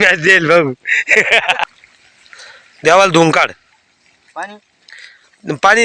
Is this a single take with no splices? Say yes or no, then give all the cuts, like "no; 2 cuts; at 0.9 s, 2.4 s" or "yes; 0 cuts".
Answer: no; 1 cut; at 1.6 s